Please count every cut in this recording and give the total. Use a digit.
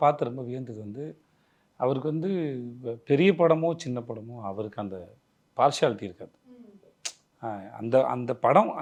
0